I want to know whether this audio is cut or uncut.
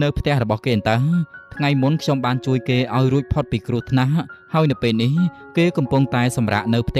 uncut